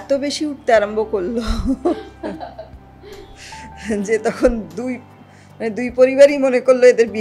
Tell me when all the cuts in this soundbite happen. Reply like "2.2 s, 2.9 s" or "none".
none